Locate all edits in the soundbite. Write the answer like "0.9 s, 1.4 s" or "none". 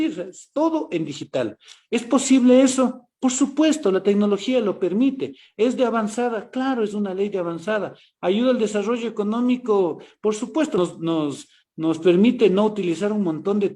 10.8 s